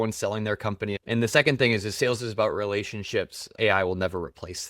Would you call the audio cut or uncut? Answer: cut